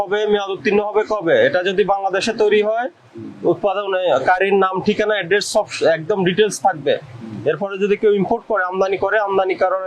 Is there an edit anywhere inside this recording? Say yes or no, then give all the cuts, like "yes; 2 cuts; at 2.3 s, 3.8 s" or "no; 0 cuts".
no; 0 cuts